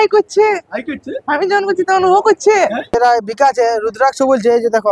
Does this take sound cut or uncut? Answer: cut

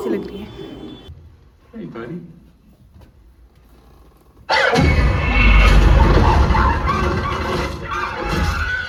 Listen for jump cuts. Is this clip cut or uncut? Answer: uncut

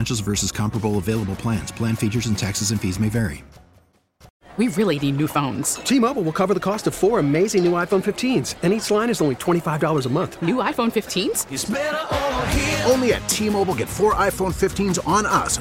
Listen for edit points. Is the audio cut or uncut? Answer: cut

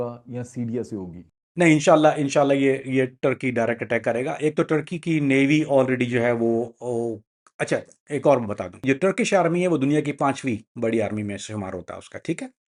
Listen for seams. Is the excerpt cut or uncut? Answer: uncut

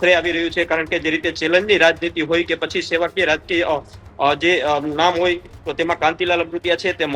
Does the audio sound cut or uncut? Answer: uncut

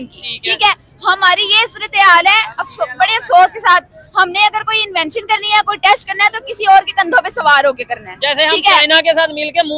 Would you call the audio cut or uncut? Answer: uncut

